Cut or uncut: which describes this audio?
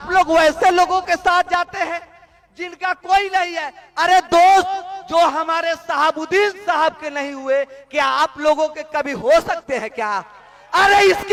uncut